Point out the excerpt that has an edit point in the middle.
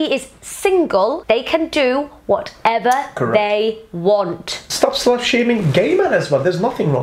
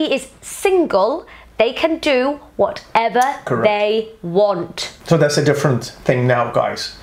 first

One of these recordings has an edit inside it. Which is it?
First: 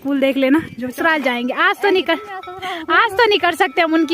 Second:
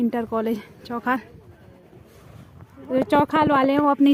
first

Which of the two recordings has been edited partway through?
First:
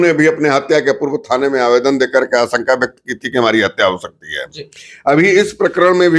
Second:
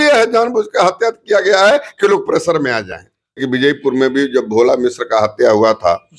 second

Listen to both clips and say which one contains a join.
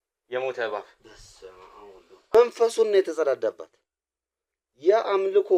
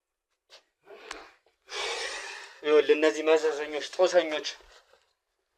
first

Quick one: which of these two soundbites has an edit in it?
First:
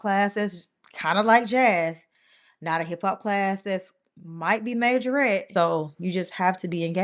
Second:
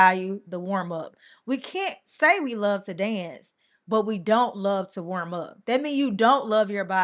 first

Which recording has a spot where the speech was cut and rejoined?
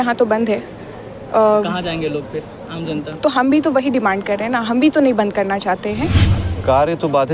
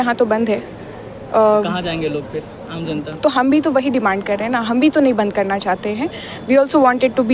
first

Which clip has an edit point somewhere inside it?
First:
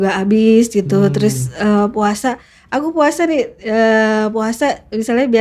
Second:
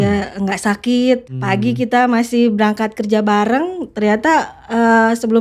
second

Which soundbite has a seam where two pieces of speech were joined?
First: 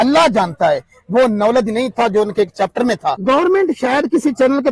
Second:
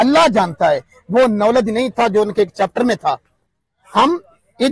first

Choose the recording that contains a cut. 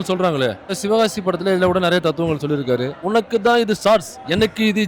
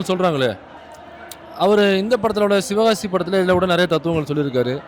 first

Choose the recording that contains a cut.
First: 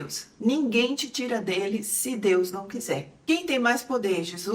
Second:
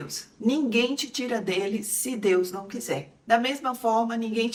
first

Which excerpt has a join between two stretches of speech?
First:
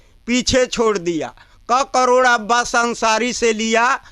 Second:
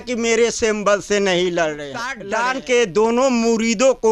second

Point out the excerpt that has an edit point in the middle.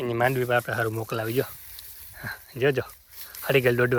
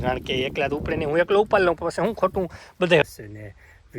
second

